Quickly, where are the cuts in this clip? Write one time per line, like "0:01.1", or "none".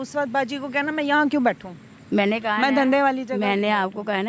none